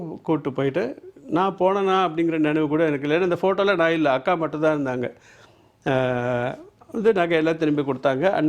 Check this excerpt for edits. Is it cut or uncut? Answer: uncut